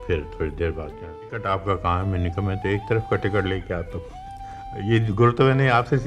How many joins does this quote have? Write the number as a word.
one